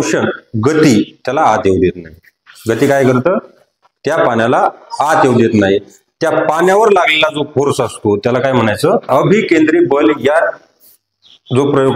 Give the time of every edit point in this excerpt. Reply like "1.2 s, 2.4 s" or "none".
9.1 s